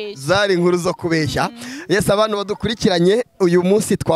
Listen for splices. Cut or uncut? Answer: uncut